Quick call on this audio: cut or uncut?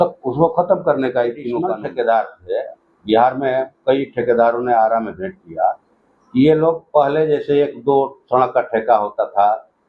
cut